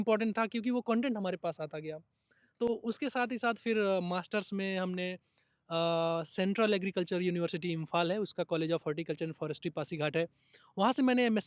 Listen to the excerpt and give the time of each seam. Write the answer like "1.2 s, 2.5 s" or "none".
none